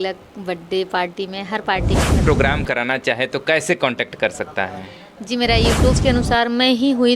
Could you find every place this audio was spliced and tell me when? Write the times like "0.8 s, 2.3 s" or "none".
2.2 s, 6.0 s